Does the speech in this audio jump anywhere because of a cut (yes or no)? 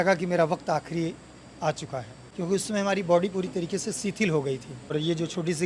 yes